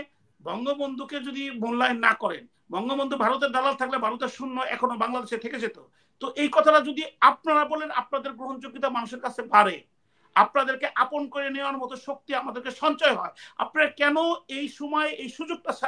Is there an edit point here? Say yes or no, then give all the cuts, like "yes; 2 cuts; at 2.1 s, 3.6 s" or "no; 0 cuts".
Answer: no; 0 cuts